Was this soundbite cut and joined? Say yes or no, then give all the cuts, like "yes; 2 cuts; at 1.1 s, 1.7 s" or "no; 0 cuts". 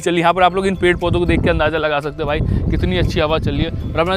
no; 0 cuts